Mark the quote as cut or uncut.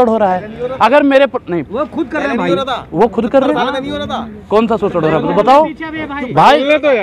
uncut